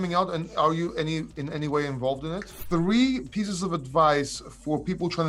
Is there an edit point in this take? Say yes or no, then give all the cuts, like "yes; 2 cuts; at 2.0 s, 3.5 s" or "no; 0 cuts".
yes; 1 cut; at 2.6 s